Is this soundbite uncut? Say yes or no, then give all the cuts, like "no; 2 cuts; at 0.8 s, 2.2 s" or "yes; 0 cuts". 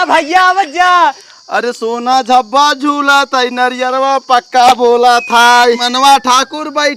no; 1 cut; at 1.2 s